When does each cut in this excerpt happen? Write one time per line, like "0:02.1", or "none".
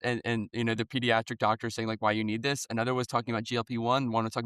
none